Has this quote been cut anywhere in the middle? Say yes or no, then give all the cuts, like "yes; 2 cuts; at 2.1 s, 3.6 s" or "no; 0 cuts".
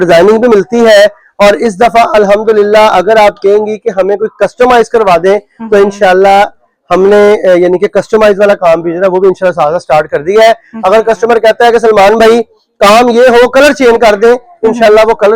no; 0 cuts